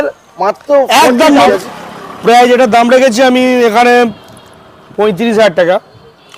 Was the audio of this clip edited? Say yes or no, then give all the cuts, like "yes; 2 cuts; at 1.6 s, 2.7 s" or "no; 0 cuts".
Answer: yes; 1 cut; at 1.5 s